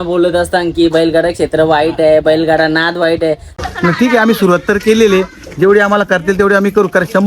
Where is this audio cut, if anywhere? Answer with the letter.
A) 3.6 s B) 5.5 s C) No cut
A